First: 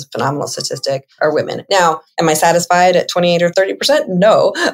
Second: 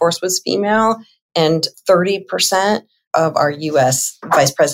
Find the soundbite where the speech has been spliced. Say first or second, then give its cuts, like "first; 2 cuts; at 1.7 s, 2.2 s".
first; 3 cuts; at 1.1 s, 2.1 s, 3.5 s